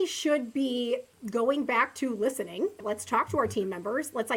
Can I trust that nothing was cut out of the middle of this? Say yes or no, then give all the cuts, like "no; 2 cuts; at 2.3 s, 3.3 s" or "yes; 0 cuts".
no; 2 cuts; at 1.2 s, 2.8 s